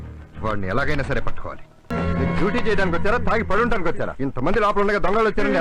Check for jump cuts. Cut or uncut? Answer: cut